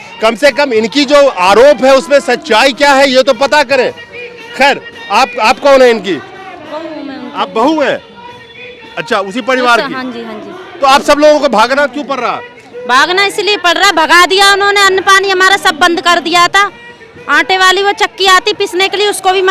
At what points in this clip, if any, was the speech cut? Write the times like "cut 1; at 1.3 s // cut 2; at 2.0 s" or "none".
none